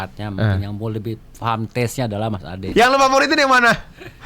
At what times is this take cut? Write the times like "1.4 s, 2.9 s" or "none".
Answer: 2.6 s